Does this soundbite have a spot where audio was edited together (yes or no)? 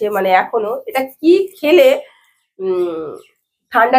no